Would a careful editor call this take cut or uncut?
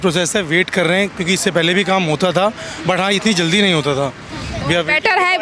uncut